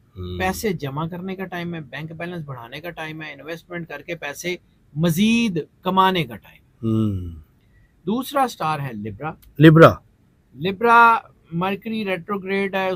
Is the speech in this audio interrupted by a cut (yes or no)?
no